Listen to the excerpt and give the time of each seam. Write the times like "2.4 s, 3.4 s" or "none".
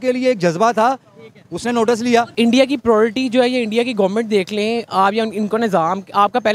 2.3 s

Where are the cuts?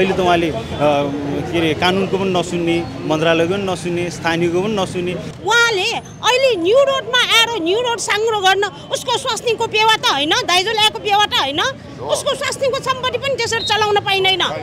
5.2 s

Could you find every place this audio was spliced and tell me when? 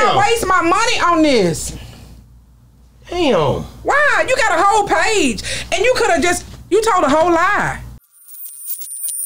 8.2 s

